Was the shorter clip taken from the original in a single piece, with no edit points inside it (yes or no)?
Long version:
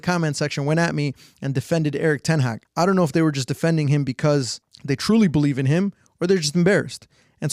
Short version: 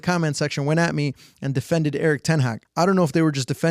yes